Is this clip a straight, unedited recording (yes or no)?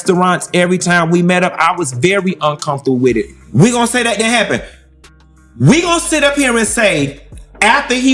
no